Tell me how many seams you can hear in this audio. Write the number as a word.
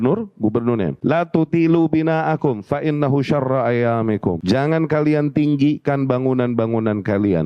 two